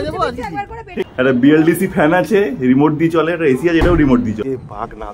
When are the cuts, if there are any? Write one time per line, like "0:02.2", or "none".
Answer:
0:01.1
0:04.4

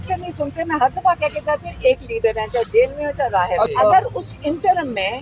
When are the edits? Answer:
none

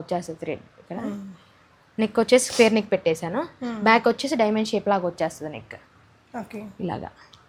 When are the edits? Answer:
none

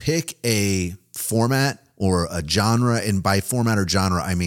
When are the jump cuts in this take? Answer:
0:01.8

